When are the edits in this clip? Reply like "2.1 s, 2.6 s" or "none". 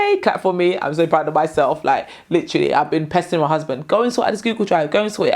none